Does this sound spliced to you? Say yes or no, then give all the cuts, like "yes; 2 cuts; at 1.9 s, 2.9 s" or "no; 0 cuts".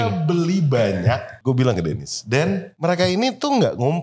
yes; 2 cuts; at 1.3 s, 2.7 s